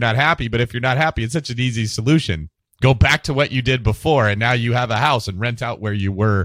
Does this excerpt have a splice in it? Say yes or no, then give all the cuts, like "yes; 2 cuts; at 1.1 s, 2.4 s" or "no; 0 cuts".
no; 0 cuts